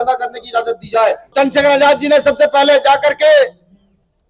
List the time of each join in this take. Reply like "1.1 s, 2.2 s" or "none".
1.3 s